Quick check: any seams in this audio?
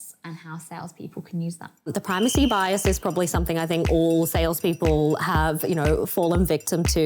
yes; 1 cut; at 1.9 s

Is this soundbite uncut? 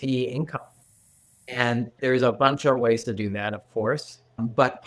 no; 1 cut; at 2.0 s

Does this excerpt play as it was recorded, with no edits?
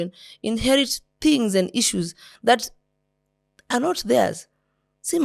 yes; 0 cuts

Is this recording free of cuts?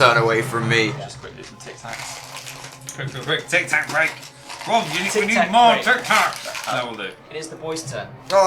yes; 0 cuts

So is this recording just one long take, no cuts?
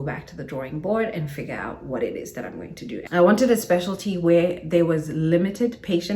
no; 1 cut; at 3.0 s

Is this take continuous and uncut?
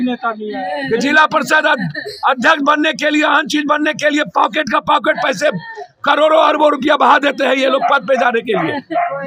yes; 0 cuts

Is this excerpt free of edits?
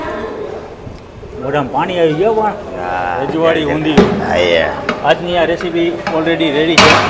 yes; 0 cuts

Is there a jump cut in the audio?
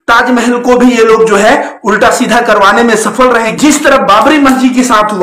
yes; 1 cut; at 3.5 s

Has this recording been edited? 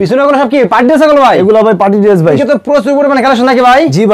yes; 1 cut; at 2.4 s

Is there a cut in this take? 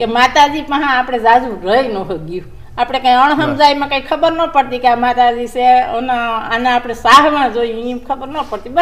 no; 0 cuts

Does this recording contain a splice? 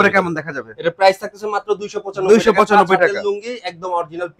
no; 0 cuts

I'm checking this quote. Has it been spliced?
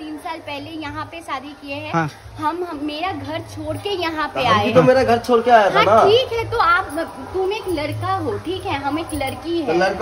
no; 0 cuts

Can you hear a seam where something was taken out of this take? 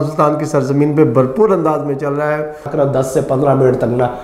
yes; 1 cut; at 2.7 s

